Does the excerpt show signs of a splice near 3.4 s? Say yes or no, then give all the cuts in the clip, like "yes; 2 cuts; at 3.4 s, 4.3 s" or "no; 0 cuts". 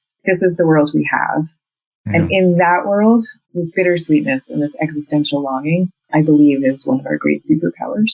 yes; 2 cuts; at 3.4 s, 6.0 s